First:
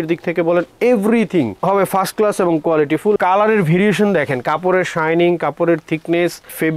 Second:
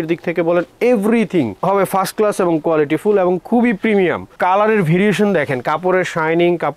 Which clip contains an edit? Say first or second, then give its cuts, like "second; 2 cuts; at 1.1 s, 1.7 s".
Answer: first; 1 cut; at 3.2 s